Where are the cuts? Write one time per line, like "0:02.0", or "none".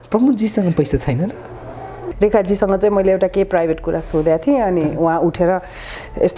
0:02.0